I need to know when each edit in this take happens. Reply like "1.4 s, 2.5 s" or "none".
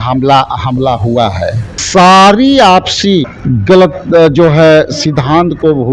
1.7 s, 3.4 s